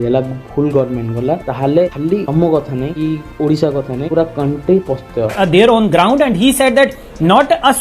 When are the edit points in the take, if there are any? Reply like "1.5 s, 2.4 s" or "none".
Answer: 5.3 s